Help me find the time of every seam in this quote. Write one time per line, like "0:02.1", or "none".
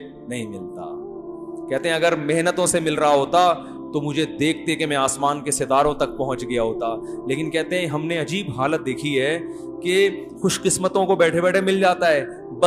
none